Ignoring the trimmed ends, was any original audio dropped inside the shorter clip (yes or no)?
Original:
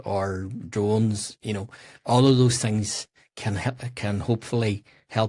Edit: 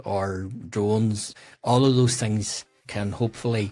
yes